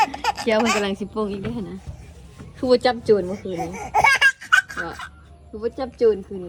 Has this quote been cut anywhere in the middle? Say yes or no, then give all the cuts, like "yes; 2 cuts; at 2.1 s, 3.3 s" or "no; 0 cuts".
no; 0 cuts